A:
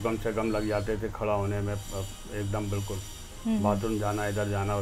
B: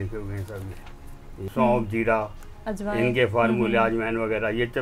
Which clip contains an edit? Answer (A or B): B